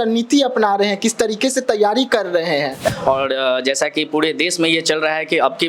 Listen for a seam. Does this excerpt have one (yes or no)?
yes